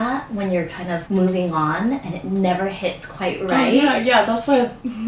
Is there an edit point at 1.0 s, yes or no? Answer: yes